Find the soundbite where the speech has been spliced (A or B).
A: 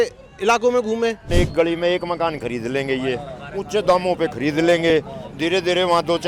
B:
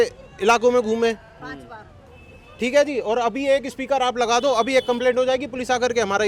A